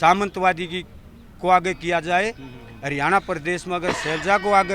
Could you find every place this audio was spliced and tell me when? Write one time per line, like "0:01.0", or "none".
none